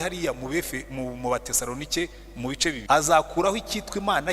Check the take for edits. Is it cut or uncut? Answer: cut